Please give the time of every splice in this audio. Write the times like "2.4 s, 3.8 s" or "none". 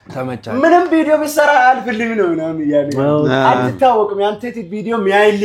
none